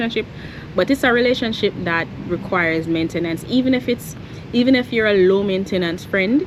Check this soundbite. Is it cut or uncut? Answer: uncut